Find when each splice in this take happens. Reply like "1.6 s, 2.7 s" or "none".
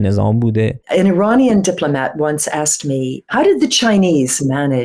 0.8 s, 3.2 s